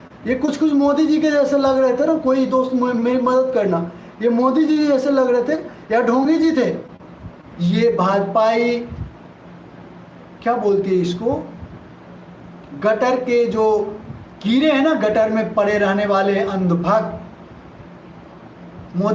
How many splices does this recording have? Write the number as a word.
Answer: one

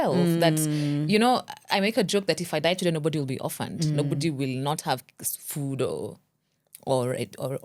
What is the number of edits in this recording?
zero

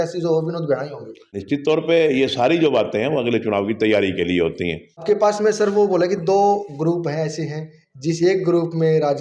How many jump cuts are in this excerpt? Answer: two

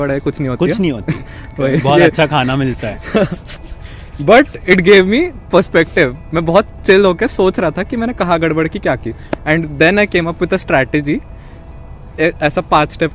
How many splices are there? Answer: zero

